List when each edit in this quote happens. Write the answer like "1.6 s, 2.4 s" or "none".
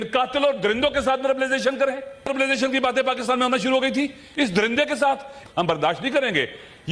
2.3 s, 5.3 s